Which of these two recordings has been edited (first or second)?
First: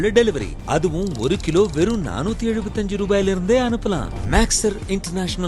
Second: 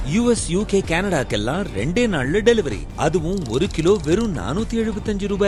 first